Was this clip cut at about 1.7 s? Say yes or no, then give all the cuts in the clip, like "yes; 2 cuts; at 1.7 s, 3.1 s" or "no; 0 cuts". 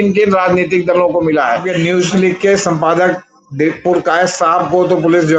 yes; 1 cut; at 1.7 s